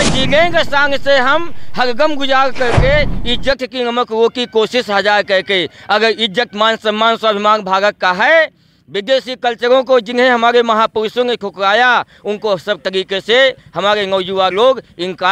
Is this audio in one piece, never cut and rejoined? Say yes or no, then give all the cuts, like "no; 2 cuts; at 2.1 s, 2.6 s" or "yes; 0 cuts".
yes; 0 cuts